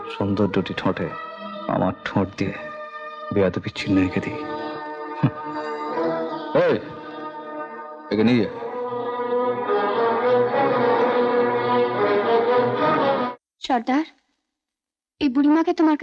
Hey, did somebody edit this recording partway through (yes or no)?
no